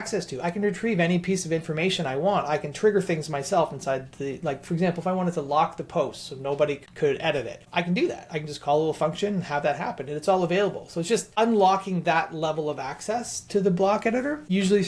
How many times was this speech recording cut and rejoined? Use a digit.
0